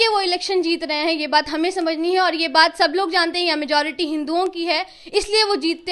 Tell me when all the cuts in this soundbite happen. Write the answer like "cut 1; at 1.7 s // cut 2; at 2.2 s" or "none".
none